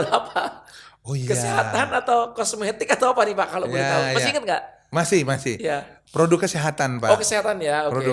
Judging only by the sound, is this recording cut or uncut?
uncut